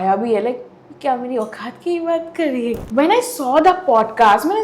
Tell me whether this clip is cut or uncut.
cut